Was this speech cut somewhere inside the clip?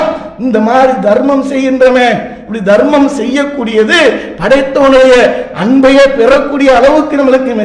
no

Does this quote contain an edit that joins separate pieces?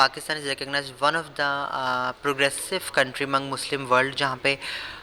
no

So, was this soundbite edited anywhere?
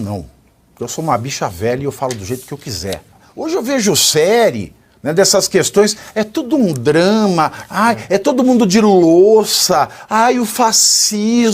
yes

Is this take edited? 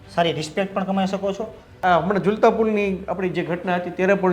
yes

